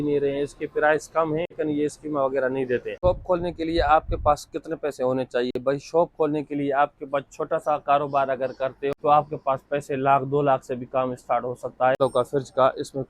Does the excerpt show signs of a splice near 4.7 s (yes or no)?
no